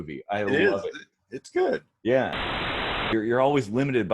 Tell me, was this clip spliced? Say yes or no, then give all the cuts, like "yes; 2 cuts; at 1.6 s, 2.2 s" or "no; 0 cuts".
yes; 1 cut; at 2.6 s